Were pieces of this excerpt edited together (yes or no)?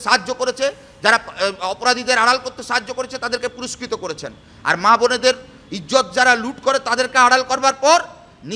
no